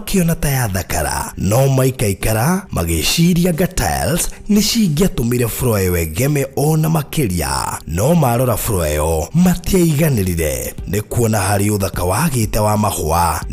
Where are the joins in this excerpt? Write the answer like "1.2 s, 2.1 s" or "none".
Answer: none

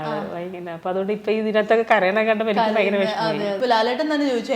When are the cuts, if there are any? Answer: 3.6 s

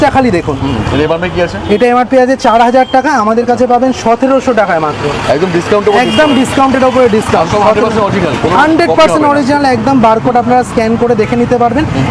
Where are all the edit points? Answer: none

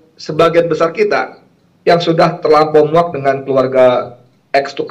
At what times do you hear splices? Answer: none

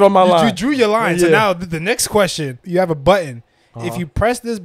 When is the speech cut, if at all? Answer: 2.6 s

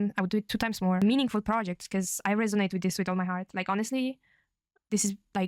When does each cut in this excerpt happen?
1.0 s

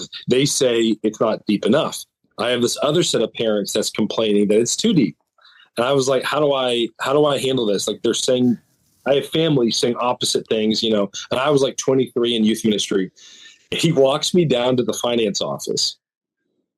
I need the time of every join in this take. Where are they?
none

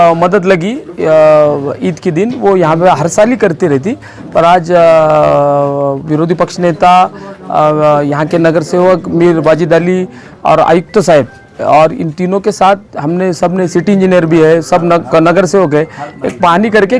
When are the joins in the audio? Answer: none

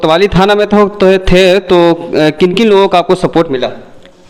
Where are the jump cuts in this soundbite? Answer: none

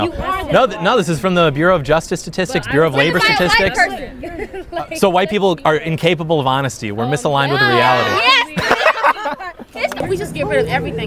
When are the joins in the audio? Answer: 10.0 s

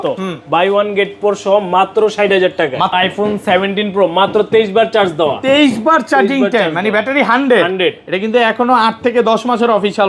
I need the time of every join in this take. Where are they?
2.9 s

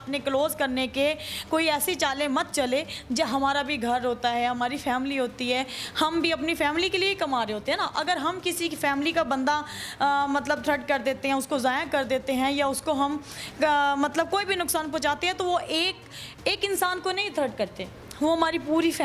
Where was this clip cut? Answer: none

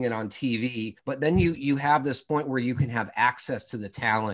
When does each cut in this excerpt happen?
1.0 s, 2.2 s

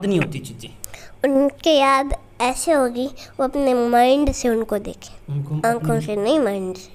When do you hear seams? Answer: none

